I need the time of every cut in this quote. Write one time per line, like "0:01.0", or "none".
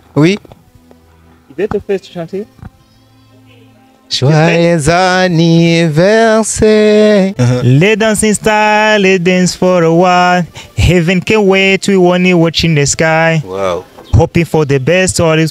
0:07.4